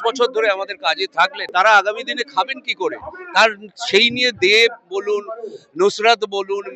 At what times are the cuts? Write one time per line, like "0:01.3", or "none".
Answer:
0:01.4